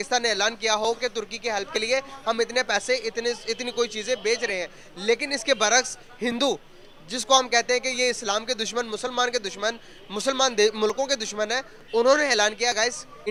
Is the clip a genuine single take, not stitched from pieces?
yes; 0 cuts

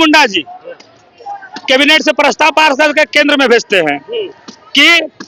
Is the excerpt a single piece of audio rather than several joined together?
yes; 0 cuts

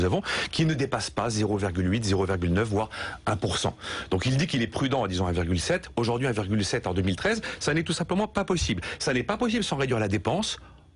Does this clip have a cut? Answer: yes; 1 cut; at 5.3 s

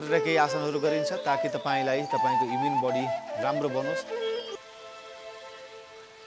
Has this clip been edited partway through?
yes; 1 cut; at 4.5 s

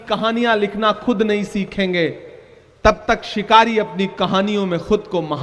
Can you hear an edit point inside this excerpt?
no; 0 cuts

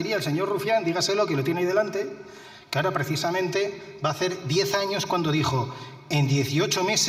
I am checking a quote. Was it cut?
no; 0 cuts

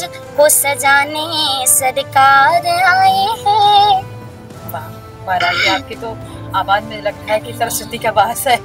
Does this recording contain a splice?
no; 0 cuts

